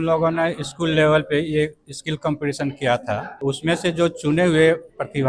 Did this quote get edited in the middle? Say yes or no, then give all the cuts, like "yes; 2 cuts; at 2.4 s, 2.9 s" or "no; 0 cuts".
no; 0 cuts